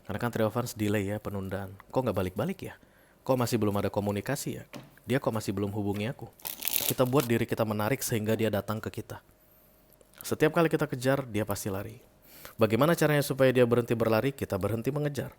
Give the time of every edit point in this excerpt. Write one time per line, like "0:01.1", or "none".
0:06.9